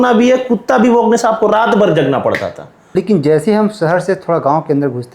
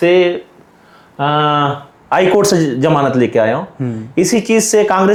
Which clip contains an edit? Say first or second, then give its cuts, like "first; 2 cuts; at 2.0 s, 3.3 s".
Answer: first; 1 cut; at 2.7 s